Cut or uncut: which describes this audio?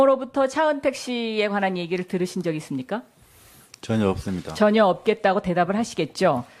uncut